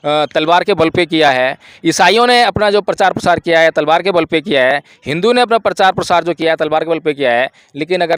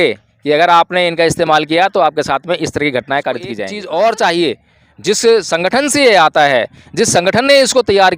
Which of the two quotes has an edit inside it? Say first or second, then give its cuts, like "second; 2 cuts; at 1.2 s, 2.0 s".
second; 1 cut; at 3.7 s